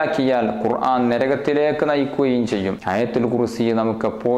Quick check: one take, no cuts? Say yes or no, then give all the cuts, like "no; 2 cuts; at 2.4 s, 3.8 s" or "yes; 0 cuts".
no; 1 cut; at 2.8 s